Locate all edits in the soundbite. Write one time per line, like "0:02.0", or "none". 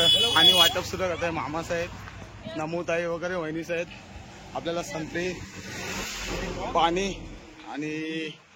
none